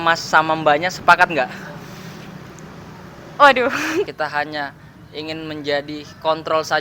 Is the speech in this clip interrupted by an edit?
yes; 1 cut; at 4.1 s

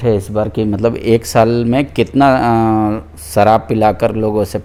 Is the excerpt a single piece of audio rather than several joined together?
yes; 0 cuts

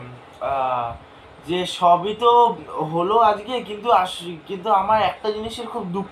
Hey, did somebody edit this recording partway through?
no; 0 cuts

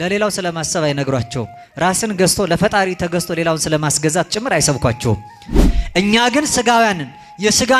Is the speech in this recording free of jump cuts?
no; 1 cut; at 5.7 s

